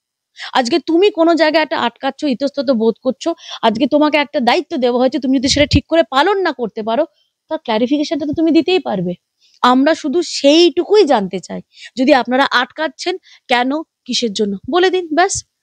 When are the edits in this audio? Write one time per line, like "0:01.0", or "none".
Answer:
none